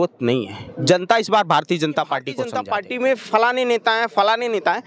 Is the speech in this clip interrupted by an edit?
yes; 1 cut; at 2.4 s

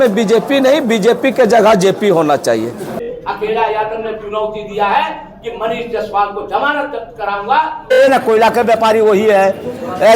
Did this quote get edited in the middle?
yes; 2 cuts; at 3.0 s, 8.0 s

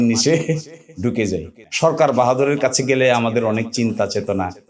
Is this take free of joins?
no; 1 cut; at 1.6 s

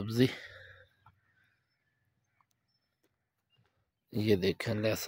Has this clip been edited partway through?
no; 0 cuts

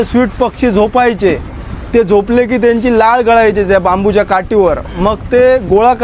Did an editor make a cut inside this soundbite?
no; 0 cuts

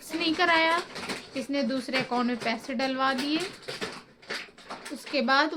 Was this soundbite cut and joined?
no; 0 cuts

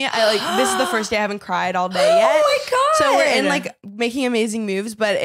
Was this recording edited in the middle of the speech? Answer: no; 0 cuts

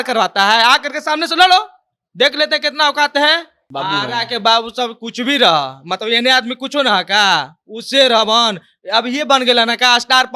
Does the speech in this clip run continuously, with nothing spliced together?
no; 1 cut; at 3.6 s

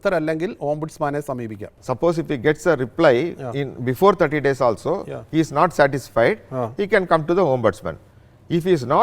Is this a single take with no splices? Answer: no; 1 cut; at 1.8 s

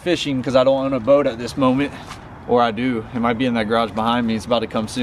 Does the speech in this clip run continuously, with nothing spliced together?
yes; 0 cuts

